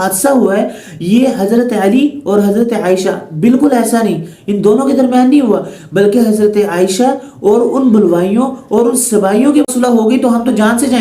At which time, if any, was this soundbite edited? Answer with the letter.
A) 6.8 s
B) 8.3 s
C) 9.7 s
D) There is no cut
C